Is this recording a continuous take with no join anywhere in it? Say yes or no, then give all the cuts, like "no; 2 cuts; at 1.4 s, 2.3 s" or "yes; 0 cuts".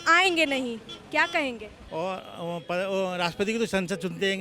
no; 1 cut; at 1.7 s